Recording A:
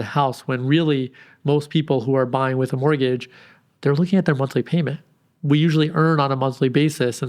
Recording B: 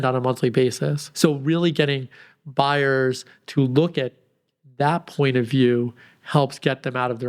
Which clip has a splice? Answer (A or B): B